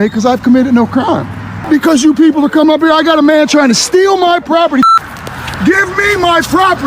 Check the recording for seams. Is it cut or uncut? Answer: cut